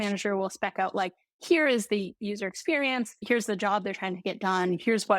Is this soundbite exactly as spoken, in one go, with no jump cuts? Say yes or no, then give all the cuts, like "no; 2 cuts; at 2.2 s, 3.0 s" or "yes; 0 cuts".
no; 1 cut; at 3.2 s